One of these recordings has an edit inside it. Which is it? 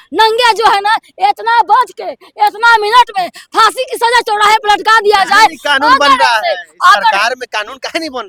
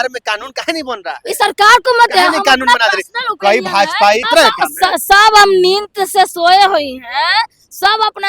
second; 1 cut; at 4.3 s

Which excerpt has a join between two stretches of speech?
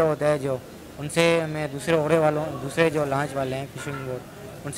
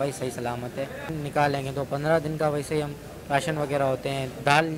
second; 1 cut; at 1.2 s

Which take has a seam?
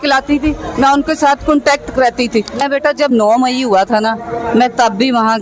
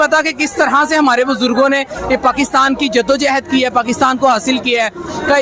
first; 1 cut; at 2.6 s

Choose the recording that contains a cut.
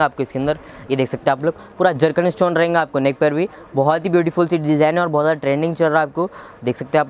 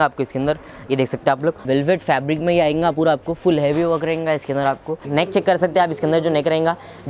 second; 2 cuts; at 1.6 s, 5.0 s

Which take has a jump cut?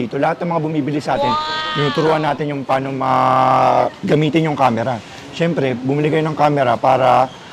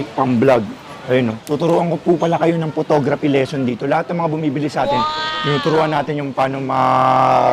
second; 1 cut; at 1.4 s

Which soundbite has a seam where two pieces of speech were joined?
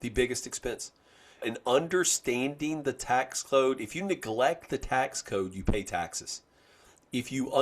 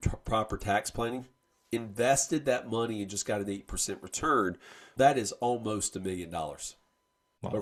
first; 1 cut; at 1.4 s

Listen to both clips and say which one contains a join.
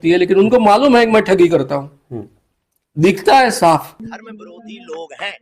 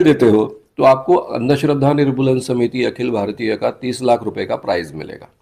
first; 1 cut; at 3.8 s

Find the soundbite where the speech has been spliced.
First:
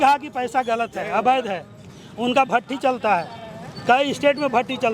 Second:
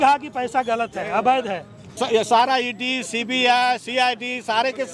second; 1 cut; at 1.9 s

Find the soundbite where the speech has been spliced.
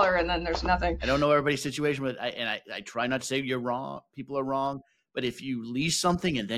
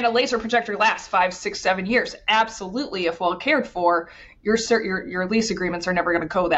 first; 1 cut; at 1.0 s

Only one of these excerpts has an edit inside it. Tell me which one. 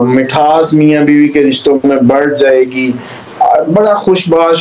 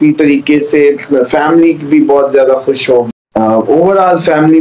second; 1 cut; at 3.1 s

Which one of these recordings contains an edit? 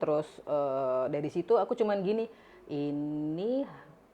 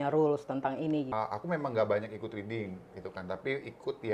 second; 1 cut; at 1.1 s

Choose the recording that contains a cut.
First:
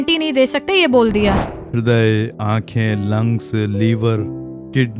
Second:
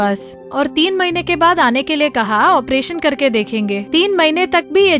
first; 1 cut; at 1.5 s

